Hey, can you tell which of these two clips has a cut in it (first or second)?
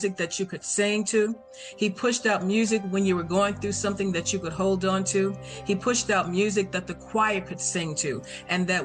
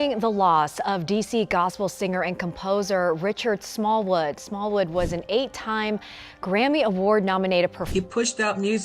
second